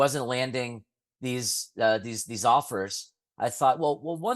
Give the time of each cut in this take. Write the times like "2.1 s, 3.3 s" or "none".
none

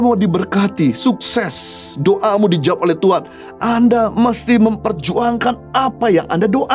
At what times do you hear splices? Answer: none

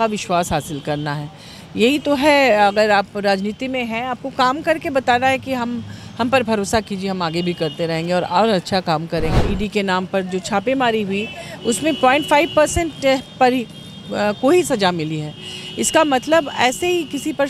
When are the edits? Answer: 9.5 s

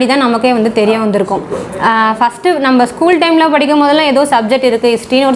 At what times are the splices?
none

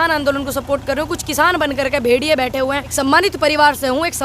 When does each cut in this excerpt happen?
2.9 s

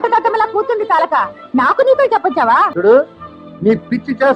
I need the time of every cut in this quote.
2.7 s

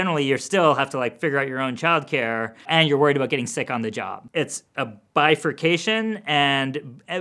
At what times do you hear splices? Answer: 2.7 s, 4.1 s

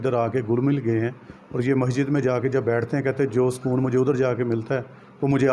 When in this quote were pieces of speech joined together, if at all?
none

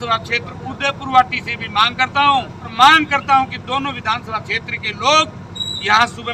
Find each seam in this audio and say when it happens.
2.7 s

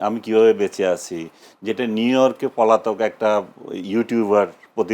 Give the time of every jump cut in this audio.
none

